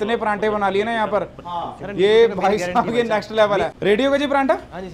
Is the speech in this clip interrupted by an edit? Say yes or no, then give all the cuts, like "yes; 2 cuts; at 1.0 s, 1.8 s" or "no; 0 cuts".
no; 0 cuts